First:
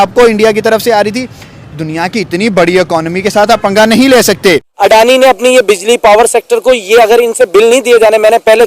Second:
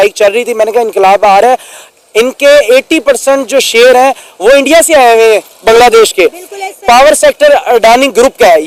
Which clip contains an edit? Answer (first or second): first